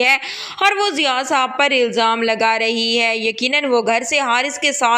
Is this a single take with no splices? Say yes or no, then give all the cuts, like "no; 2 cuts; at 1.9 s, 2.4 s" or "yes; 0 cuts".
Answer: yes; 0 cuts